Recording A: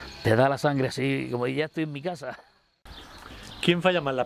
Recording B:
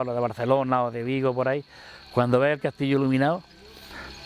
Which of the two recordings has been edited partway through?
A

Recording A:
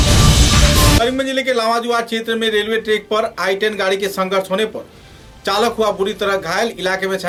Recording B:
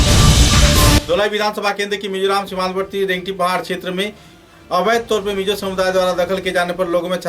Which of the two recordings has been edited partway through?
B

